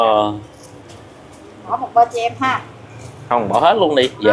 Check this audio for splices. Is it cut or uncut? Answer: uncut